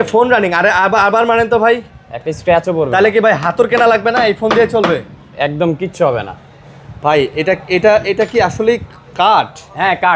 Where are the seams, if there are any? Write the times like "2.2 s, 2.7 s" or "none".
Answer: none